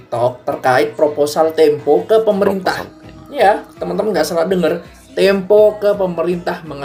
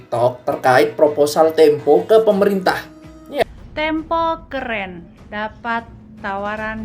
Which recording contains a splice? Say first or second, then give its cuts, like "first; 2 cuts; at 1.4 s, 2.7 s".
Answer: second; 1 cut; at 3.4 s